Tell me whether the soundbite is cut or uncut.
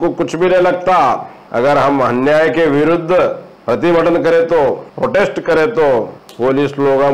cut